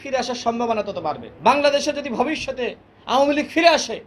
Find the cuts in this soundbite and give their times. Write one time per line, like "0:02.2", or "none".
0:01.3